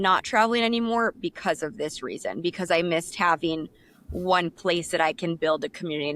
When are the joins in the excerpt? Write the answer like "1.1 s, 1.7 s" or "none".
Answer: none